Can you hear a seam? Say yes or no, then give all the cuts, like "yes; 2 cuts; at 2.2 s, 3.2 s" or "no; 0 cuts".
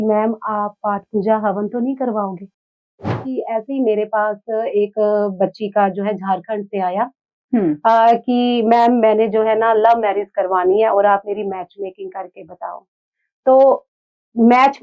yes; 1 cut; at 3.1 s